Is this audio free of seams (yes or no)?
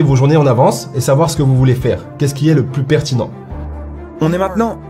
no